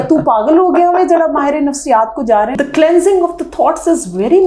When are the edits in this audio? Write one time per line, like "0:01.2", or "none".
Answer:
0:02.5